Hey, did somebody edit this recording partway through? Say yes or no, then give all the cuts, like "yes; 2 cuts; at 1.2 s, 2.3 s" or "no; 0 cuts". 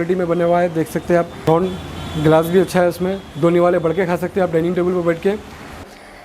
no; 0 cuts